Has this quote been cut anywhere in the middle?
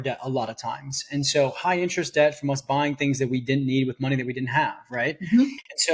no; 0 cuts

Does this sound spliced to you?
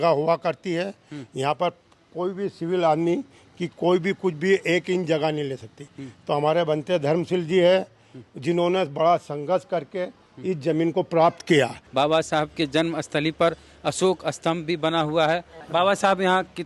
yes; 2 cuts; at 11.8 s, 15.5 s

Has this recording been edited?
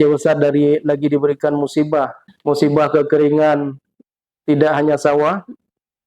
yes; 1 cut; at 2.2 s

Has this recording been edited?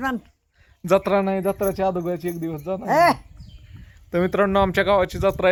no; 0 cuts

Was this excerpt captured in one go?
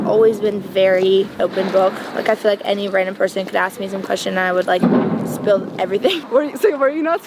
no; 2 cuts; at 1.4 s, 6.2 s

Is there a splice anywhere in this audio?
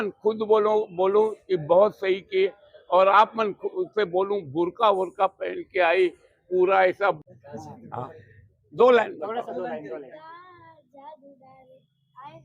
yes; 1 cut; at 7.2 s

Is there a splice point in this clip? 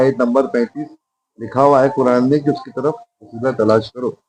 no; 0 cuts

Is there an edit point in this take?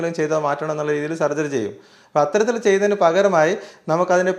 no; 0 cuts

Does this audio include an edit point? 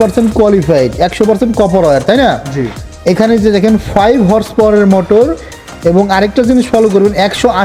no; 0 cuts

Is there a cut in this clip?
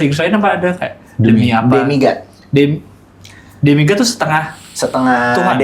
no; 0 cuts

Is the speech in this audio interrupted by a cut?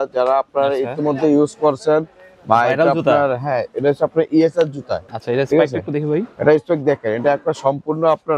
yes; 1 cut; at 5.0 s

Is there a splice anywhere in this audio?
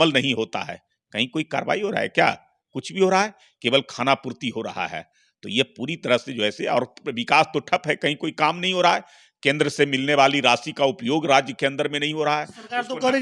no; 0 cuts

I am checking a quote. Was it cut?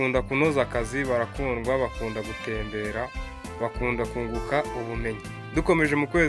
yes; 1 cut; at 5.3 s

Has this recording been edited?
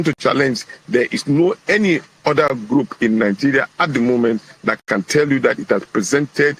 yes; 1 cut; at 3.1 s

